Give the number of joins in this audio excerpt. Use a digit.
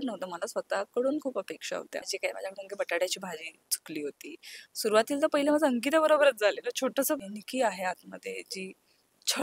2